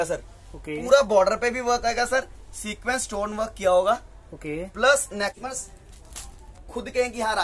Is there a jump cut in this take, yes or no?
yes